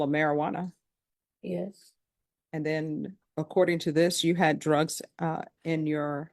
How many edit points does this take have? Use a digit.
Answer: 0